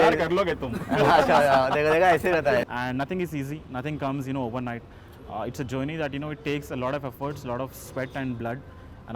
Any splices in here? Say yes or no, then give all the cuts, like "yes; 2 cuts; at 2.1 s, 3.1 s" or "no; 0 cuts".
yes; 1 cut; at 2.6 s